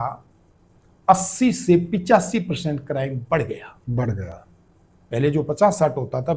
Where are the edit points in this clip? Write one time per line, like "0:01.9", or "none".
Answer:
none